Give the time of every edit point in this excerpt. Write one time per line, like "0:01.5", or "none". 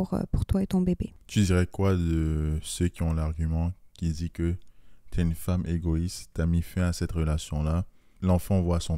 0:01.2
0:08.1